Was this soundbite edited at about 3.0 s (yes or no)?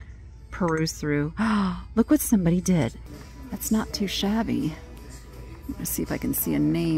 yes